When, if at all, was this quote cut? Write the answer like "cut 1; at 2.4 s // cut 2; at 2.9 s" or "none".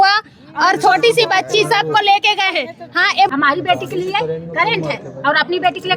cut 1; at 3.3 s